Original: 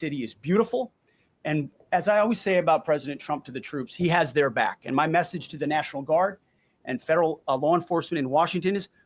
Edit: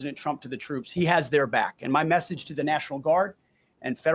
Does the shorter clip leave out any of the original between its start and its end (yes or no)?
no